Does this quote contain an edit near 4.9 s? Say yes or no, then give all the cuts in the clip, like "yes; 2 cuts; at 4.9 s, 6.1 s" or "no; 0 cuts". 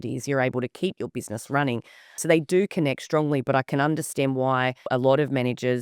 yes; 2 cuts; at 2.2 s, 4.9 s